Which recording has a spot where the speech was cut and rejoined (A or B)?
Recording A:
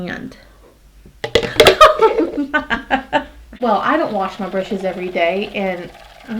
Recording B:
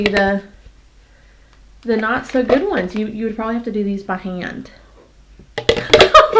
A